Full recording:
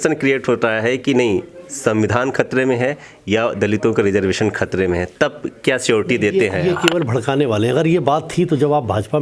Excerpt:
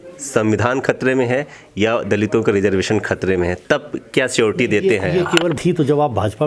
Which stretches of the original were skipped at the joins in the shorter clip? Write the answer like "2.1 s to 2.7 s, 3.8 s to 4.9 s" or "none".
7.1 s to 8.3 s